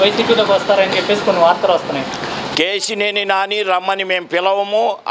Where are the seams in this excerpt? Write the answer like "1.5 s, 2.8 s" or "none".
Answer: none